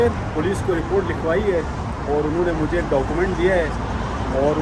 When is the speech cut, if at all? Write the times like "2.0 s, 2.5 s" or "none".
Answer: none